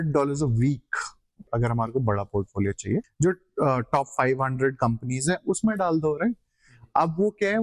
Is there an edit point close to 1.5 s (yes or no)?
yes